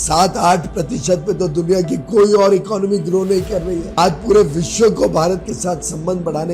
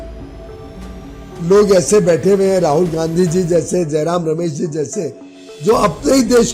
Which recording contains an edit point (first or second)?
first